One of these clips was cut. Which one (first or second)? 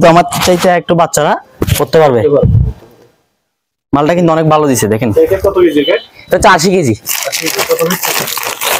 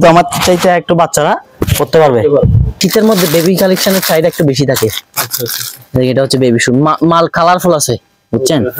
second